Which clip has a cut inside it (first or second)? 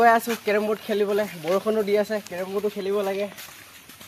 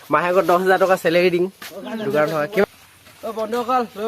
second